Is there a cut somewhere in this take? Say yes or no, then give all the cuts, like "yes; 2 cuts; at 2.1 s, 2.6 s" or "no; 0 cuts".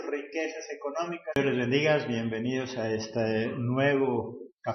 no; 0 cuts